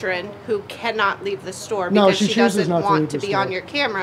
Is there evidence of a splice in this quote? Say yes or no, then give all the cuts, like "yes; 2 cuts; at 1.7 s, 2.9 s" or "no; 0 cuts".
no; 0 cuts